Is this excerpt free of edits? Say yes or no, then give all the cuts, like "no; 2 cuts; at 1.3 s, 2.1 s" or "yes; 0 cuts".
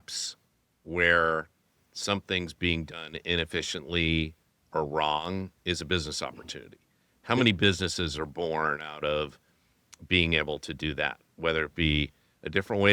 yes; 0 cuts